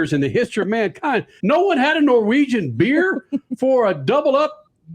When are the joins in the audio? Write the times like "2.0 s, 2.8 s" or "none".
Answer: 1.3 s